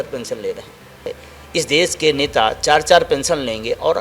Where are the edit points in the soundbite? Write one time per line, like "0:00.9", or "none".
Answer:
0:01.2